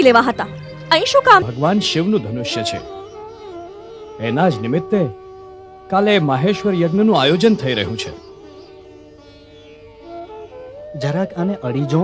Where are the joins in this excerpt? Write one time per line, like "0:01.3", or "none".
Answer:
0:01.5